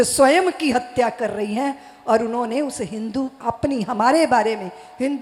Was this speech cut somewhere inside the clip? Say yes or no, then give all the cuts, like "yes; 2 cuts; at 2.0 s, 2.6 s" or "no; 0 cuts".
no; 0 cuts